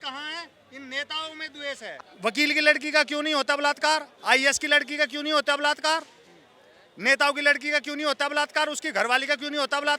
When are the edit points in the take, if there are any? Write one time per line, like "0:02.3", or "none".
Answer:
0:02.0